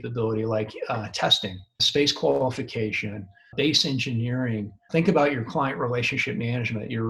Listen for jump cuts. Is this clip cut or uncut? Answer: cut